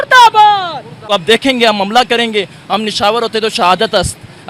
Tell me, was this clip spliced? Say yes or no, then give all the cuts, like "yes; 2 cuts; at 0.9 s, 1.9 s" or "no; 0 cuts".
yes; 1 cut; at 1.0 s